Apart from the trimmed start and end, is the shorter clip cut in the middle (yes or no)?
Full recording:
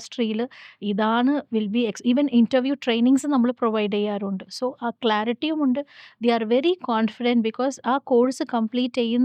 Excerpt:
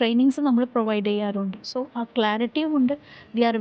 no